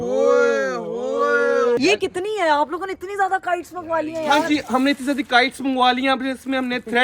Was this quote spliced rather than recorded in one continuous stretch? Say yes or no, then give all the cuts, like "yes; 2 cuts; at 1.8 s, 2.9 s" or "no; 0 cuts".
yes; 1 cut; at 1.8 s